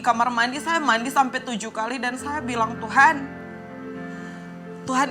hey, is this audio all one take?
yes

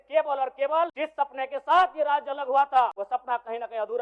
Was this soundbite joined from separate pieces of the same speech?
yes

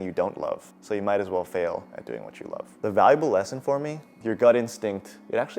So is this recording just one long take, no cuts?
yes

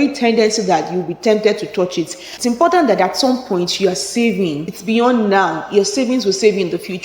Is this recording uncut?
no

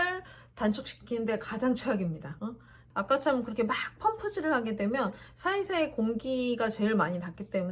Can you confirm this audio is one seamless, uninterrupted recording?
no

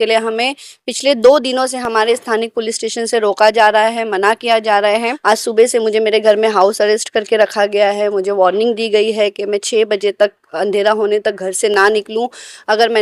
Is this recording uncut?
no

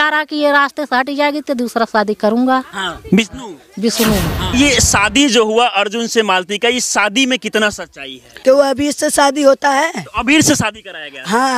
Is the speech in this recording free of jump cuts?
no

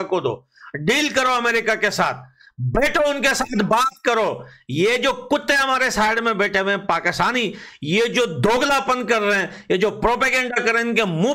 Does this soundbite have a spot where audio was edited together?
no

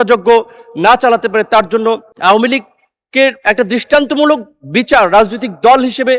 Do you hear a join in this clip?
yes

